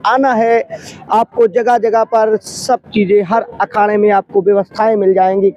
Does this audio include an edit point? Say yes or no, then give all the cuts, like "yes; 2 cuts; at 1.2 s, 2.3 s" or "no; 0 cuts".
no; 0 cuts